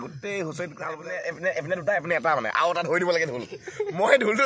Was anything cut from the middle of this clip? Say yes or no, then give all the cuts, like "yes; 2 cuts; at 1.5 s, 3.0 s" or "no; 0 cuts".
yes; 1 cut; at 1.0 s